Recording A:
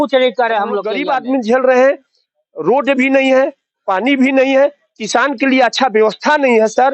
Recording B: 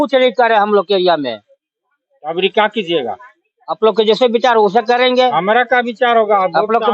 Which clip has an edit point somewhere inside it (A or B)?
A